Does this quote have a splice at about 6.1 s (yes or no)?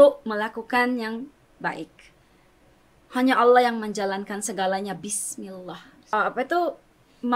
yes